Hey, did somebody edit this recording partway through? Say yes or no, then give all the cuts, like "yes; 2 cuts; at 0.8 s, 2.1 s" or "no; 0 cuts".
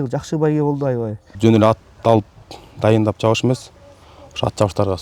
yes; 1 cut; at 1.3 s